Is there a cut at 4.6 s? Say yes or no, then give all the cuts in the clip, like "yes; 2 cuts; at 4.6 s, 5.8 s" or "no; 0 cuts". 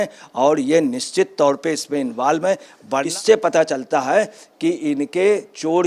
no; 1 cut; at 3.1 s